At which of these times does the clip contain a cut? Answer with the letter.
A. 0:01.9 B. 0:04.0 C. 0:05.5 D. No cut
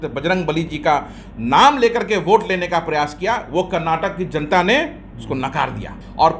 C